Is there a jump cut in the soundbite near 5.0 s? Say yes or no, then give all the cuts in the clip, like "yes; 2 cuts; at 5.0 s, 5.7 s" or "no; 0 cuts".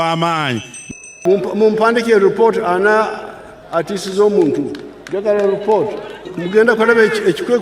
no; 2 cuts; at 1.2 s, 6.3 s